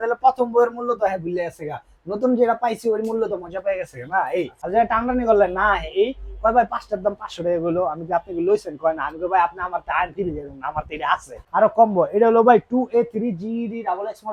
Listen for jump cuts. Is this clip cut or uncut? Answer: cut